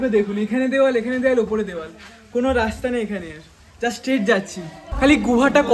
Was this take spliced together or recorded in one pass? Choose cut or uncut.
cut